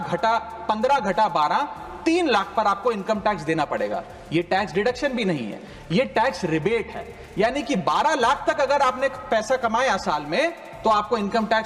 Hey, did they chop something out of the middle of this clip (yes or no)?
no